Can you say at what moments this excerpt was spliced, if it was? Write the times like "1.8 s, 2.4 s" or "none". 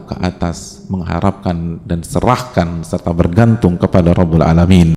none